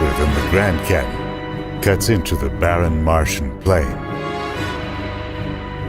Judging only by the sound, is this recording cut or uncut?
cut